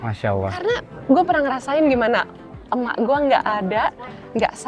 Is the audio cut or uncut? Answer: uncut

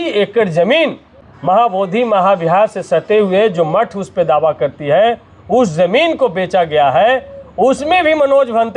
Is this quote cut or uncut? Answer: cut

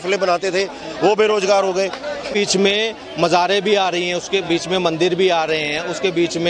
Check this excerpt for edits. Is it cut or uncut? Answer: cut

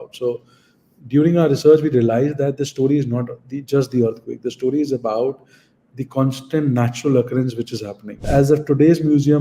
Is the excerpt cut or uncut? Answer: cut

